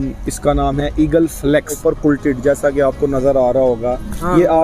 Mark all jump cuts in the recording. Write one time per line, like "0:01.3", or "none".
0:01.8